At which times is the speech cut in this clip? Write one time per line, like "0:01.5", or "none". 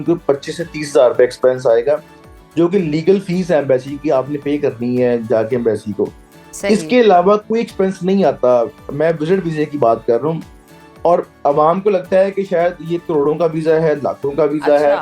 none